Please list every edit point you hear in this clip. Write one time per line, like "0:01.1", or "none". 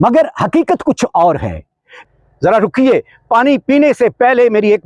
0:02.0